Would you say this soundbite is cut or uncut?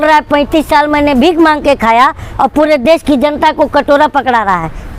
uncut